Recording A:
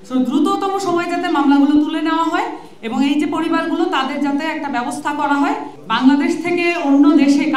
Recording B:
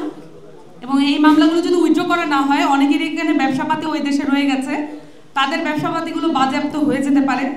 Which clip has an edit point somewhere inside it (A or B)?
A